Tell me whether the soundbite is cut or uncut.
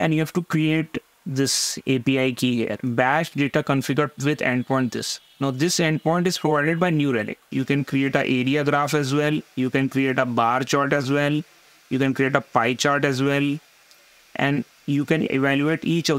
cut